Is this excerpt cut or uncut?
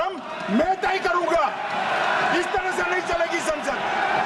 uncut